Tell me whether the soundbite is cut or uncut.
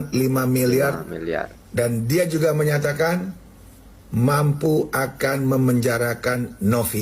uncut